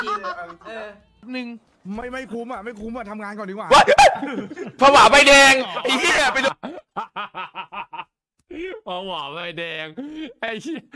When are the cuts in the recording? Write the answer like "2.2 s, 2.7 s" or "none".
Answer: 1.3 s, 3.8 s